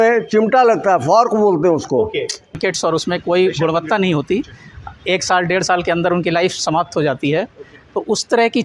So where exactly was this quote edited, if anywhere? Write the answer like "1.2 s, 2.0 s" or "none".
2.6 s